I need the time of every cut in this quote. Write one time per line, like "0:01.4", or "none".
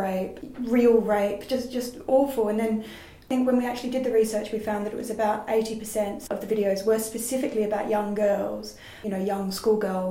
0:03.2
0:06.2
0:08.9